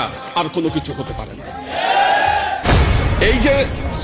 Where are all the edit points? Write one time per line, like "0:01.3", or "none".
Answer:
0:02.7